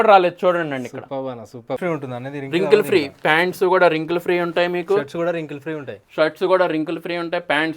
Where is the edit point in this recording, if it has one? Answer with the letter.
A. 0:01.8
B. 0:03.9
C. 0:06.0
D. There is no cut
A